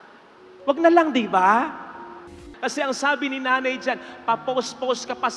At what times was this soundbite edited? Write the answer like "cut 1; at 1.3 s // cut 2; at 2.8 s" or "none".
cut 1; at 2.4 s